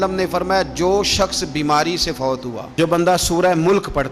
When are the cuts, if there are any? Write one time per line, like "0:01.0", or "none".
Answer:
0:02.7